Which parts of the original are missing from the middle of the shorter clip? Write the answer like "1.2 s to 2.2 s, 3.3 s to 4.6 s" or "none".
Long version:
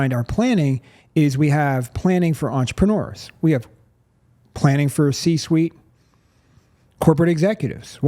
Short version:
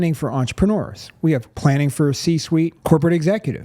3.7 s to 4.5 s, 5.8 s to 6.9 s